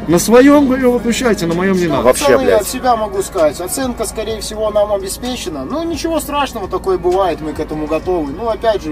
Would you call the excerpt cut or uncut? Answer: cut